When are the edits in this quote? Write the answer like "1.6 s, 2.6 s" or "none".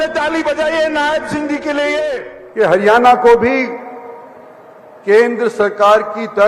2.3 s